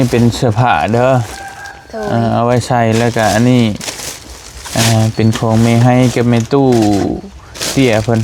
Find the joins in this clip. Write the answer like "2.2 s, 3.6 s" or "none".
none